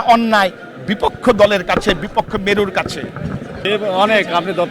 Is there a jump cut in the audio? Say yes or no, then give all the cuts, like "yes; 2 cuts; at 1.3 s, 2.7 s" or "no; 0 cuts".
yes; 1 cut; at 3.6 s